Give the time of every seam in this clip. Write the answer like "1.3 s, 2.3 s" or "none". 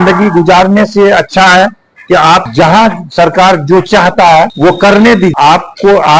none